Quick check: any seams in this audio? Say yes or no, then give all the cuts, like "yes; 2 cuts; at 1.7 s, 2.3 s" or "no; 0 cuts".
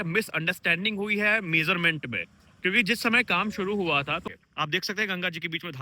yes; 1 cut; at 4.3 s